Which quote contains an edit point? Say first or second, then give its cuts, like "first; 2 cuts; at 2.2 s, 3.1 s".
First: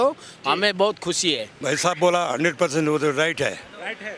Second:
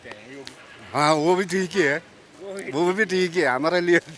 first; 1 cut; at 1.6 s